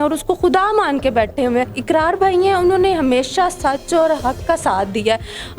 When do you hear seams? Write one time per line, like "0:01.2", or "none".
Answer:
0:01.7